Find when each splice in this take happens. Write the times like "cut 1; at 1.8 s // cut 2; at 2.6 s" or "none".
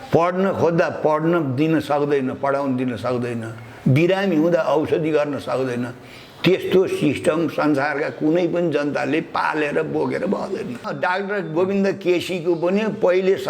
cut 1; at 10.9 s